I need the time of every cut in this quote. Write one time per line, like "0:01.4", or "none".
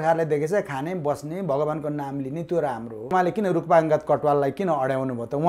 0:03.1

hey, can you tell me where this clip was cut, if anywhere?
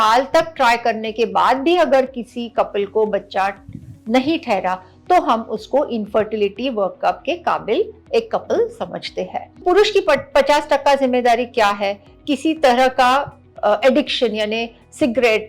0:09.6
0:12.1

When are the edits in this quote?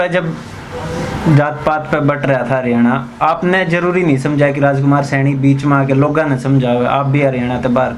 none

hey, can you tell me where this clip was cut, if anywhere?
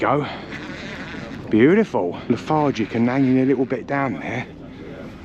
0:02.2

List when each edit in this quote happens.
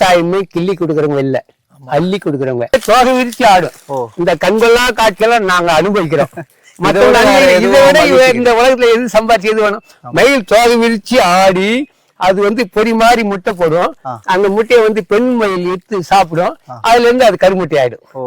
0:02.7

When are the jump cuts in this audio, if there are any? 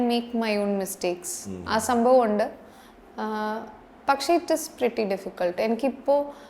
none

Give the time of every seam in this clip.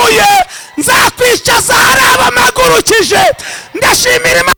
none

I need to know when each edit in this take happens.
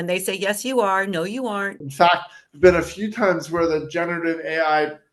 0:01.8

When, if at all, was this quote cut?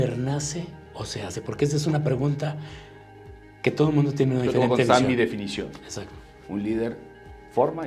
none

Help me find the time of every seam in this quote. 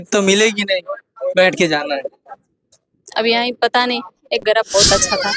0:04.4

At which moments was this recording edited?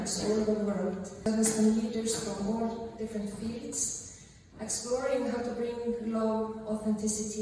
0:01.2

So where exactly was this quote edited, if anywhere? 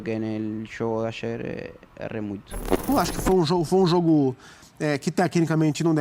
0:02.9

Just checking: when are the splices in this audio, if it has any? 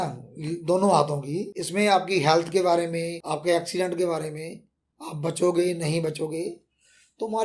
0:01.6
0:03.2

